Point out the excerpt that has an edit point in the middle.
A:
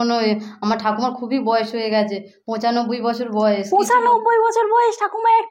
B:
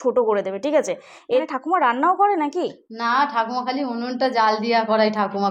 B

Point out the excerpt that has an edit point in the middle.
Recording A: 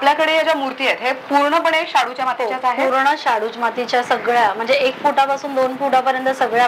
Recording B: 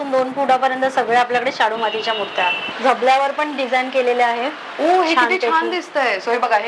B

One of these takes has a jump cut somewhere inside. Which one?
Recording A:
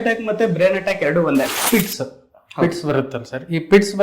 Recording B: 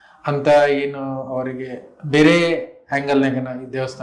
A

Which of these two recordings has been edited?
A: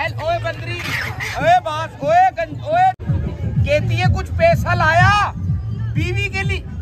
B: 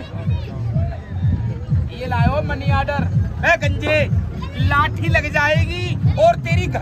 A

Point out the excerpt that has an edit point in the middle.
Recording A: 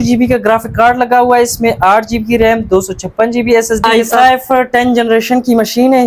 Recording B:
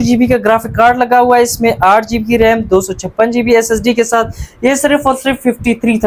A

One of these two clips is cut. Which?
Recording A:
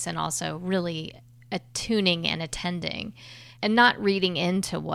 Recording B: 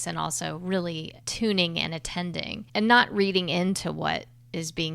B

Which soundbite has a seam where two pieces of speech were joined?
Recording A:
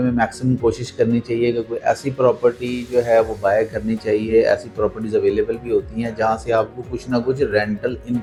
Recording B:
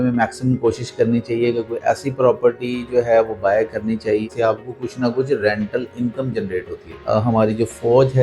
B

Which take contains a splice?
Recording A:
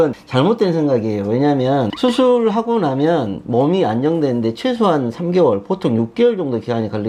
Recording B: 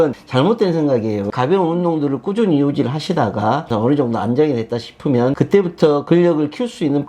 B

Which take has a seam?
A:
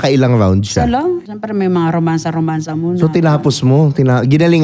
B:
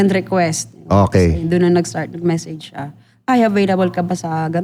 A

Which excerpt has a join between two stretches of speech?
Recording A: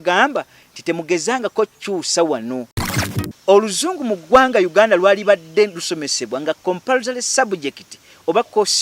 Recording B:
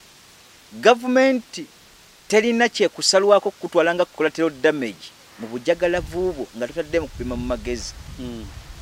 A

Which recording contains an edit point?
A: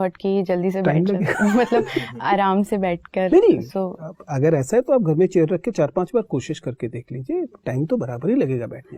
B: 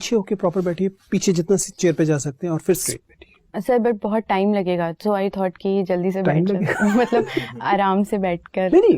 B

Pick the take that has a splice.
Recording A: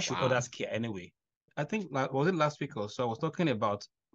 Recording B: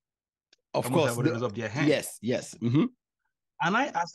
A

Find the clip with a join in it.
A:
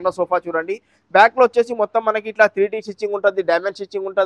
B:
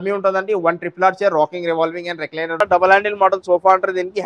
B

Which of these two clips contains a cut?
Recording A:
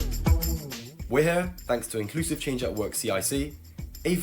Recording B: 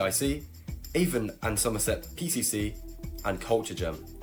A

